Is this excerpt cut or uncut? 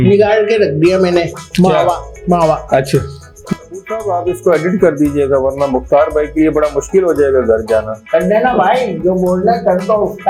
cut